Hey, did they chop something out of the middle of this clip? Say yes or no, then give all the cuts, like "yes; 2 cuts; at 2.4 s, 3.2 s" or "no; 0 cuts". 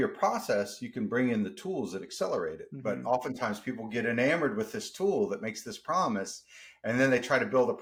no; 0 cuts